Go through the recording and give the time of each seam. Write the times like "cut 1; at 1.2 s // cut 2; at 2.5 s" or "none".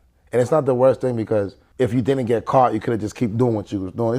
cut 1; at 1.6 s